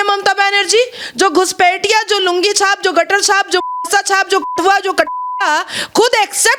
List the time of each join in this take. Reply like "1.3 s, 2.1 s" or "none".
none